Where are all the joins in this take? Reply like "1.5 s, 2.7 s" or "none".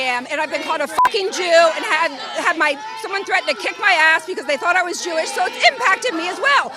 none

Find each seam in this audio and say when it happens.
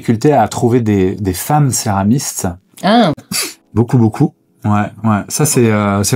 none

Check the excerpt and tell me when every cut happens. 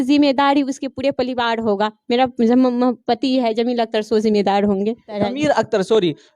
5.2 s

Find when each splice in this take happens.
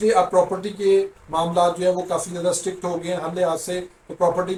none

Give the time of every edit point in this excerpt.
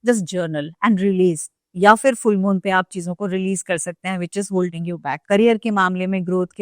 none

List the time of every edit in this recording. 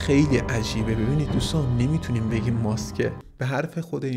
3.2 s

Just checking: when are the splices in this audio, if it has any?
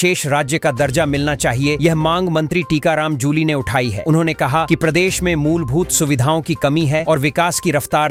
none

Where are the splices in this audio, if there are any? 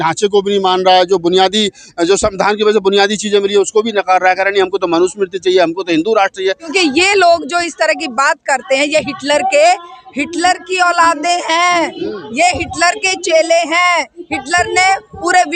6.7 s

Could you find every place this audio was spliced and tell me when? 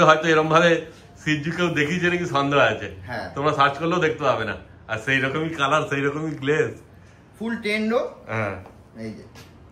none

